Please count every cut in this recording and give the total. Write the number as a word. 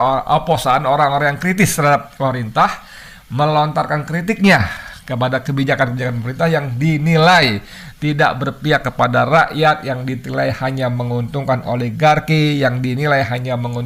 zero